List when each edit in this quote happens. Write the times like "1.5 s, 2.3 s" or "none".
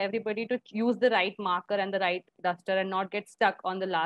none

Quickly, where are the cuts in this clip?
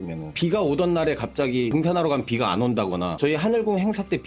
3.1 s

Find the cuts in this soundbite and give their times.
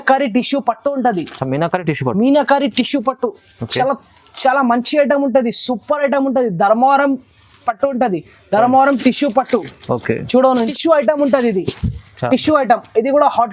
10.7 s

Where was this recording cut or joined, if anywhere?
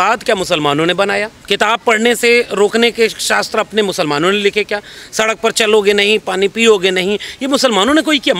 1.3 s

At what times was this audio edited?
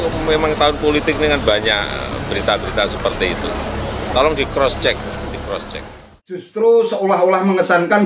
6.5 s

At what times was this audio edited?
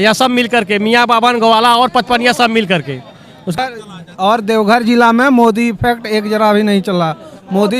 3.5 s

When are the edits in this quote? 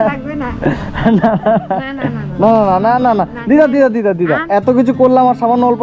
none

